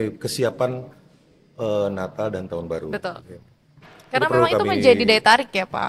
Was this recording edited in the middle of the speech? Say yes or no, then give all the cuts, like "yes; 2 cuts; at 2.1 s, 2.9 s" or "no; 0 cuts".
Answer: no; 0 cuts